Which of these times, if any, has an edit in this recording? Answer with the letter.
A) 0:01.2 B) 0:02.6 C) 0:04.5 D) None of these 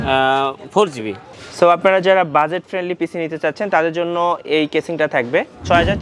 A